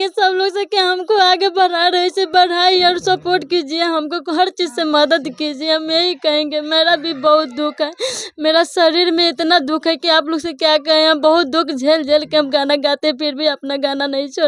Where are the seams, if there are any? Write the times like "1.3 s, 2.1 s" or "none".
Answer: none